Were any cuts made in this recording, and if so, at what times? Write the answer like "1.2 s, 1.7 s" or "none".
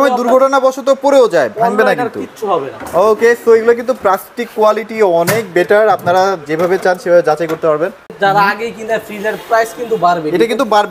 8.2 s